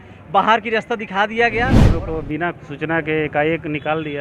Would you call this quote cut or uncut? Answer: cut